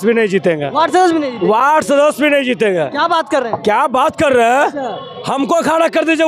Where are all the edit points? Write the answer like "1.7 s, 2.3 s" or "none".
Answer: none